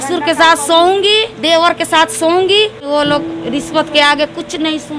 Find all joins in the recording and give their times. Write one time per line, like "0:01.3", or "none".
0:02.8

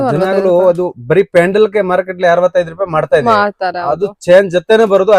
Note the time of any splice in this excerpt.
none

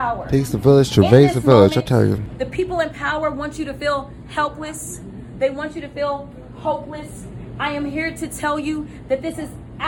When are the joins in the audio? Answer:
none

